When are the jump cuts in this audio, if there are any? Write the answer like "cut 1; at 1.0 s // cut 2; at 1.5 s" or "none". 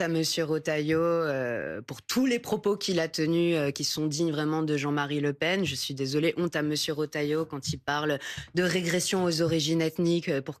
none